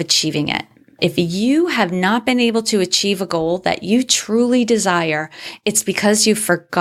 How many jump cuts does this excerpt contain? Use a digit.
1